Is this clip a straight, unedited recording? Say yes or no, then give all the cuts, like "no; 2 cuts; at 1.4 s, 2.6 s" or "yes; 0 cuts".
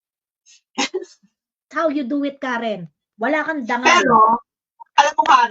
no; 1 cut; at 1.7 s